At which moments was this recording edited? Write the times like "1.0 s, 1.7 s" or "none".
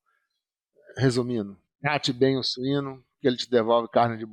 none